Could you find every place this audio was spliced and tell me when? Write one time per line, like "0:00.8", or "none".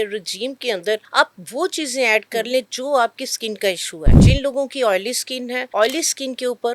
0:01.1
0:04.2
0:05.6